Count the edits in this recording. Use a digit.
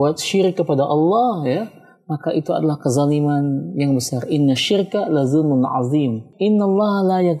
1